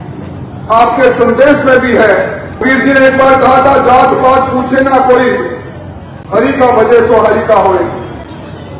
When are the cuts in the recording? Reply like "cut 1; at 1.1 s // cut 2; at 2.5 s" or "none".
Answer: cut 1; at 2.6 s